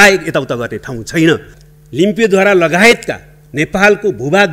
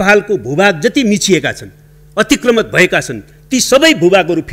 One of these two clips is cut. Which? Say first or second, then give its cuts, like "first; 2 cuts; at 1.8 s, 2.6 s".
first; 1 cut; at 1.5 s